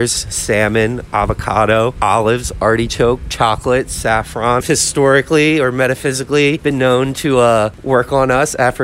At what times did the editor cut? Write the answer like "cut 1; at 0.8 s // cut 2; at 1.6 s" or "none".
cut 1; at 4.6 s // cut 2; at 6.6 s